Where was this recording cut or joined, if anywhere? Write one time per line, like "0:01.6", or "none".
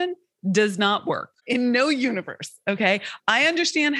none